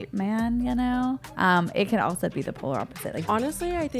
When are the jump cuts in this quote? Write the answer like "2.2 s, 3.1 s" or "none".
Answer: 1.3 s, 3.2 s

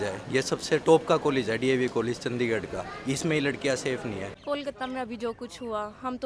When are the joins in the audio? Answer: 4.3 s

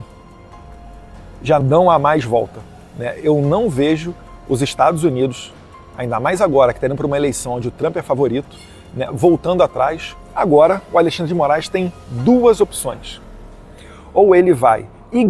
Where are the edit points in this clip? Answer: 10.4 s

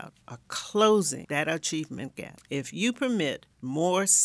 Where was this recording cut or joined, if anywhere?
1.2 s, 2.3 s

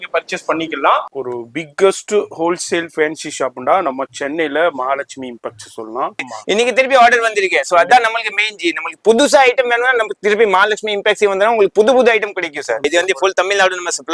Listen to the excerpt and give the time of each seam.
1.1 s, 6.3 s, 12.8 s

